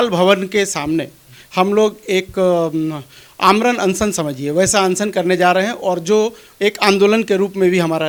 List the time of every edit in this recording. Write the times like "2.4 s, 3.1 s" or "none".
none